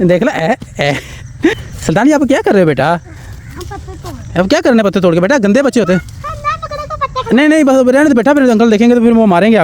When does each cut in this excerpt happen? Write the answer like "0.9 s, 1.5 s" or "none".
1.5 s